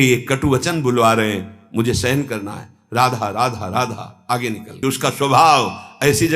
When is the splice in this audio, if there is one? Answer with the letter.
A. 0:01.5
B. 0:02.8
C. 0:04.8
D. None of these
C